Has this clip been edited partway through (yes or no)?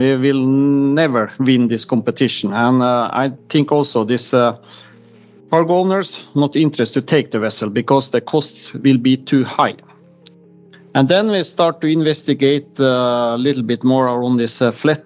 no